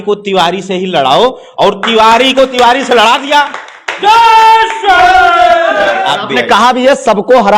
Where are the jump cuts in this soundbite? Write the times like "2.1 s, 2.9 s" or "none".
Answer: 6.0 s